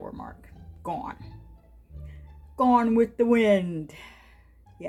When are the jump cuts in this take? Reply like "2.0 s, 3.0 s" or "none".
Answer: none

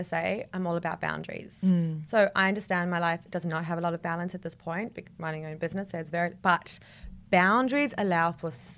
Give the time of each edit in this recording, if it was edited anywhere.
none

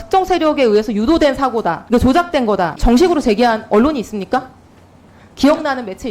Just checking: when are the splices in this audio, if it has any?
1.8 s, 2.8 s

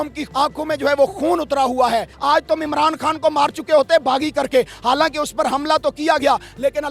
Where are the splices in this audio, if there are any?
2.1 s

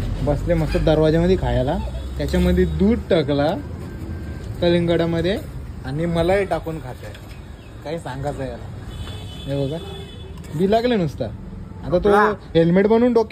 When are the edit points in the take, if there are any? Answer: none

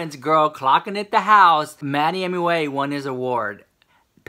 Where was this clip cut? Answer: 1.8 s

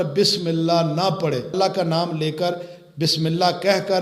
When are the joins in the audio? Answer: 1.5 s

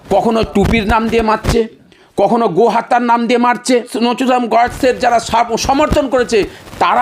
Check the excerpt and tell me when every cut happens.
3.9 s

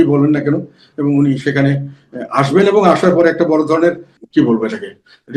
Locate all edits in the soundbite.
4.1 s

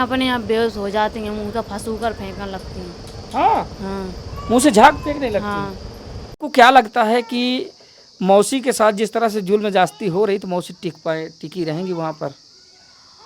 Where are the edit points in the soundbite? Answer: 6.4 s

